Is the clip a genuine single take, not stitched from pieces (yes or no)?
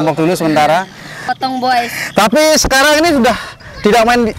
no